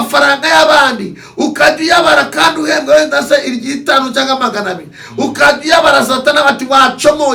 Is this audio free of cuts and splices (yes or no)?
yes